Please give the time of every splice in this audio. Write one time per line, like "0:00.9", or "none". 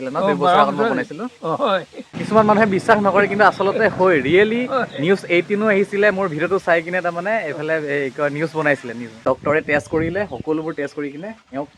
0:02.2
0:09.5